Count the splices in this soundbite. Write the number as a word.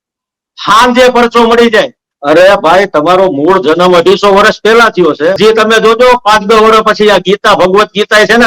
two